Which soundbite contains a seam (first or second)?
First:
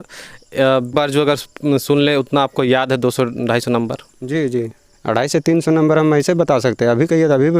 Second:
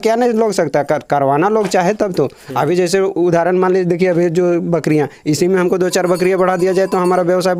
first